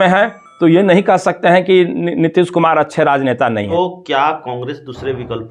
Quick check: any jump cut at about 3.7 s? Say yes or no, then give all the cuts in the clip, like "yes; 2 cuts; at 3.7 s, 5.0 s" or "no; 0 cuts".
yes; 1 cut; at 3.7 s